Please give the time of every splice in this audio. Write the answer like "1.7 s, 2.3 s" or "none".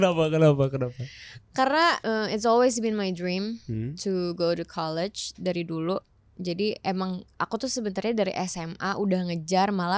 2.0 s